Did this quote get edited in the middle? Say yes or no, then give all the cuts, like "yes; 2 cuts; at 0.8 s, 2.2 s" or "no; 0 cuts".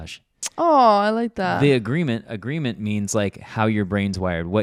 no; 0 cuts